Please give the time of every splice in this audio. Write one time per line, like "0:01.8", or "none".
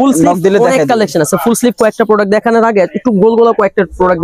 none